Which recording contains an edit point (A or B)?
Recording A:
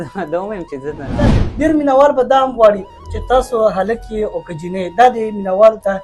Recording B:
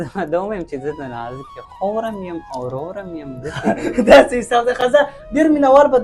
A